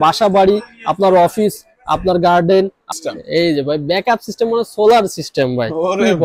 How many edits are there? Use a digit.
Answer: 1